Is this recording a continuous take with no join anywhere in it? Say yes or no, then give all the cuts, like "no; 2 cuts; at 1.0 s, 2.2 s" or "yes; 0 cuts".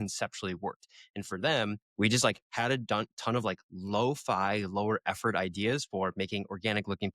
no; 1 cut; at 1.8 s